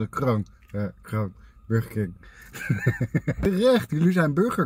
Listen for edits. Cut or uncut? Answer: cut